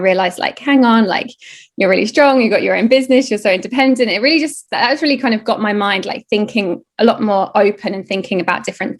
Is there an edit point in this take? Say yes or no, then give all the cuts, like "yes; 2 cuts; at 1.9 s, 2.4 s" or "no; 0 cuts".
no; 0 cuts